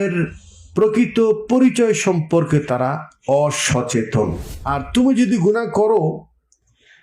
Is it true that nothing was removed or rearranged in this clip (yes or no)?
no